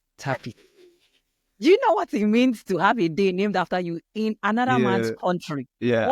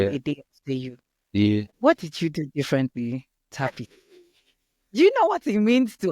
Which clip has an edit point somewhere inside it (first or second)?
second